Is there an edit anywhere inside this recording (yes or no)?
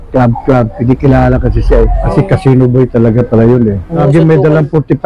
yes